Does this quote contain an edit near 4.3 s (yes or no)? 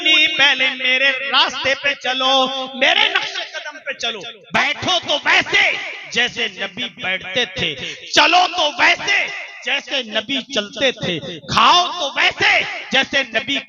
yes